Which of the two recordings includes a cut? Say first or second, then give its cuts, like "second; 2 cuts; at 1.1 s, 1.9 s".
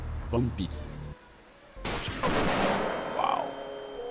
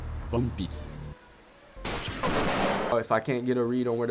second; 1 cut; at 2.9 s